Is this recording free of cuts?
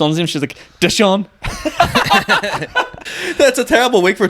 no; 1 cut; at 3.0 s

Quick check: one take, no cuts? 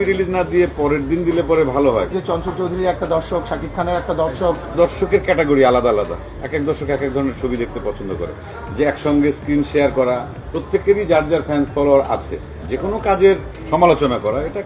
no; 4 cuts; at 2.1 s, 4.7 s, 8.5 s, 12.6 s

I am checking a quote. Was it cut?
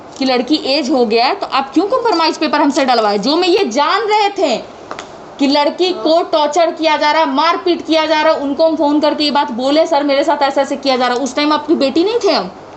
no; 0 cuts

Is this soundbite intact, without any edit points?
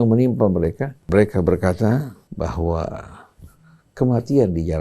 no; 2 cuts; at 1.0 s, 2.2 s

